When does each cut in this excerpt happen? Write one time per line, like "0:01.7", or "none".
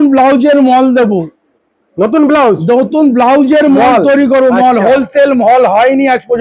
none